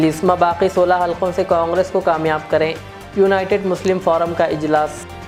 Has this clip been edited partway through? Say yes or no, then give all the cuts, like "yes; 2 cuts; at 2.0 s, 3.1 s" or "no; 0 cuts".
no; 0 cuts